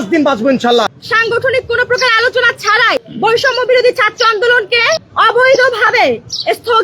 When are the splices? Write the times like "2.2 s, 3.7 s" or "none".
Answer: 1.0 s, 3.1 s